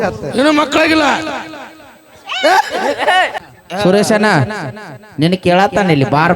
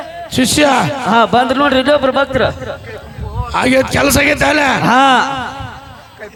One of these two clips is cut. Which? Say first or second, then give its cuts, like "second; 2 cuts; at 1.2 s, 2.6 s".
first; 1 cut; at 3.4 s